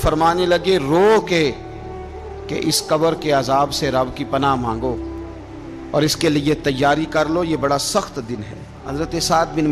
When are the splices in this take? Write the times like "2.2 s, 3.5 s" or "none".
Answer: 8.8 s